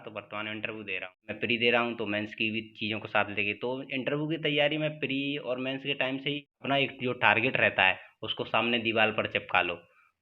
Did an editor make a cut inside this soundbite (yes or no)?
yes